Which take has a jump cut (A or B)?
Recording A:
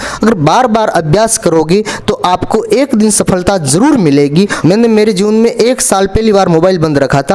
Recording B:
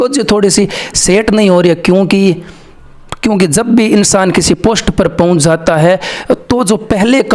A